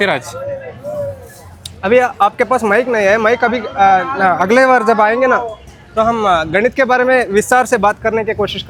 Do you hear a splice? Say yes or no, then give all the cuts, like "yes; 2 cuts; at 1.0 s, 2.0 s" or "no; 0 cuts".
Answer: no; 0 cuts